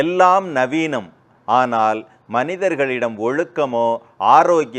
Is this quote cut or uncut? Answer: uncut